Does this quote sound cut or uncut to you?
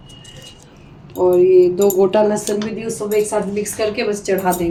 uncut